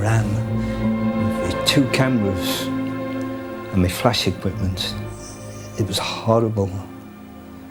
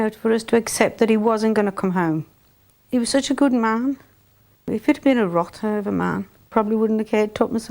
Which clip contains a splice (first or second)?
second